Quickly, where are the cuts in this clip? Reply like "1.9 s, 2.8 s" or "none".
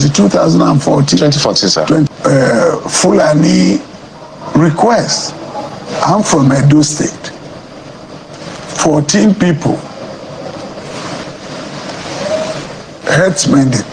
2.1 s